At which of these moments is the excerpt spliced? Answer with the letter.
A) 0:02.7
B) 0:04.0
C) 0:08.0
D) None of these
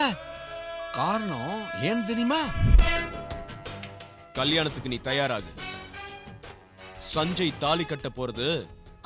A